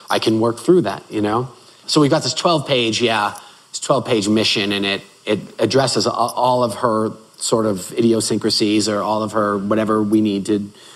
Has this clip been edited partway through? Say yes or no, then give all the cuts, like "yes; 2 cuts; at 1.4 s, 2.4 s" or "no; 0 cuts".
yes; 1 cut; at 1.8 s